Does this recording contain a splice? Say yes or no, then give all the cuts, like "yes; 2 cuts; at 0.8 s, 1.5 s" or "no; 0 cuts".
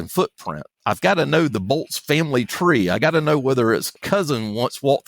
yes; 1 cut; at 4.0 s